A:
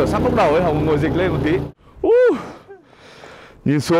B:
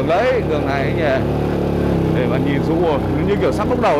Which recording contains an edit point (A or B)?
A